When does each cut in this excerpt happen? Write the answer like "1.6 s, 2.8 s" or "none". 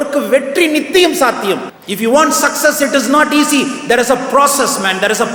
none